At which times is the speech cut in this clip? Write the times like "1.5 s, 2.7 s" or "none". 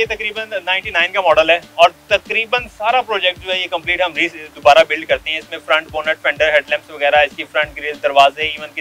none